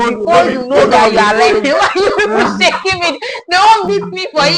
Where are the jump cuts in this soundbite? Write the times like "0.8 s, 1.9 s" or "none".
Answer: none